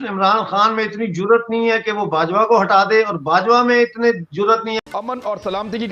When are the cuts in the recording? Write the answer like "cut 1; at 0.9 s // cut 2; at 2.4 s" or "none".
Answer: cut 1; at 4.8 s